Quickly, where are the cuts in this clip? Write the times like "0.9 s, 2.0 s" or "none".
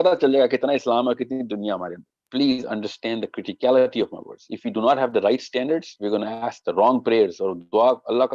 2.2 s